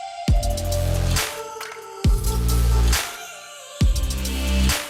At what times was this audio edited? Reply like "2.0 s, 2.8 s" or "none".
none

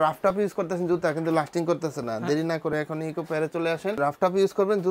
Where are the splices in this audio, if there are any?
4.0 s

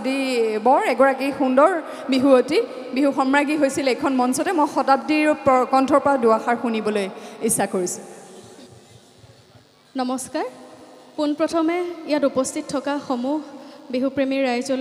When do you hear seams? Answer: none

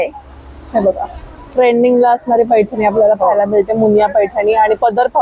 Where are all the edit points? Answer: none

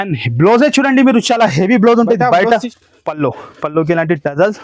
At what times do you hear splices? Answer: 2.7 s

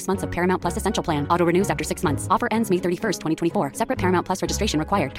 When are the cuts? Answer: none

